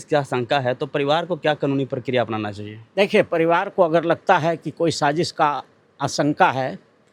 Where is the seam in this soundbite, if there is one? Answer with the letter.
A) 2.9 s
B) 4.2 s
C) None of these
C